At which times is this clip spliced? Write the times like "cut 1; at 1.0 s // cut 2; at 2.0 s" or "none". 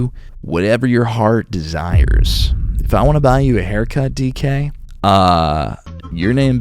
none